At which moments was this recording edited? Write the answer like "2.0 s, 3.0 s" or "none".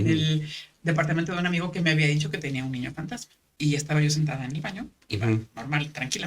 3.4 s